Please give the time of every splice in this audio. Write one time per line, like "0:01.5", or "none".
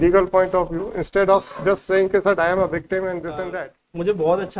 0:03.4